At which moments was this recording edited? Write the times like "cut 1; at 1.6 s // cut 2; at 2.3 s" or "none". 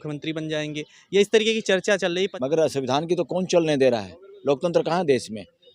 cut 1; at 2.3 s